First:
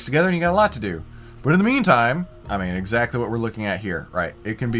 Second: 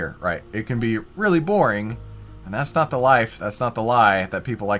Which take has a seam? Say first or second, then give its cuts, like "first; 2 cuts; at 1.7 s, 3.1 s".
first; 1 cut; at 2.4 s